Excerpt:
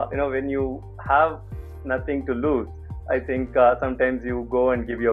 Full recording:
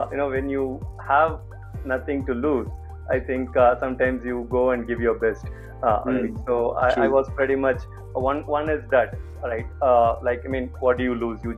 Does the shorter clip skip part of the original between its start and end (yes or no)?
no